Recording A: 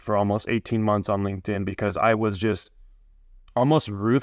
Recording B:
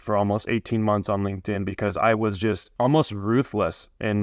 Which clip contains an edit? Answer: B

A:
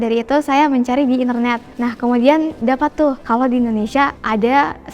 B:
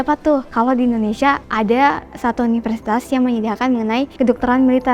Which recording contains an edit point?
A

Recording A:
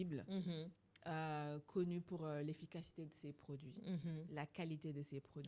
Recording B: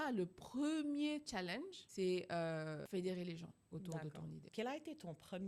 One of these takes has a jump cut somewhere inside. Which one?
B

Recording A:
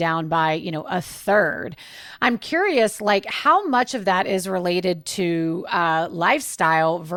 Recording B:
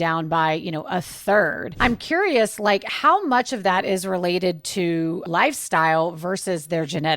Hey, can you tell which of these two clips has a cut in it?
B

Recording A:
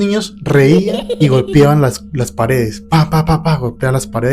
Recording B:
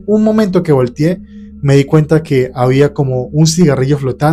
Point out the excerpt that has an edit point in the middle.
A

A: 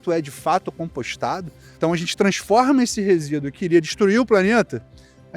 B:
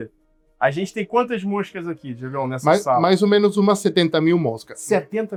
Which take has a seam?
A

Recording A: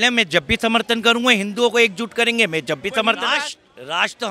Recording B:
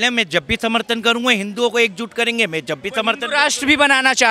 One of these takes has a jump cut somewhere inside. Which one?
A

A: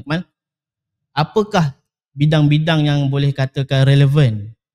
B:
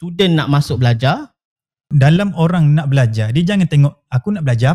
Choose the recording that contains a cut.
B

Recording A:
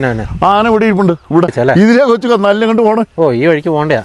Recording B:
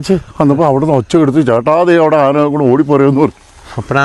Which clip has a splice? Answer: A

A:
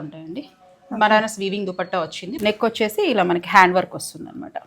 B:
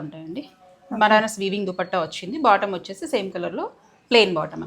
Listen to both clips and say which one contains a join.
A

